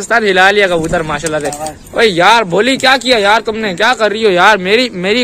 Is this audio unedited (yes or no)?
yes